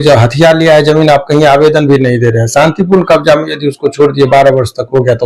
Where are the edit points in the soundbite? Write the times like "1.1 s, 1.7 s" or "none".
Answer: none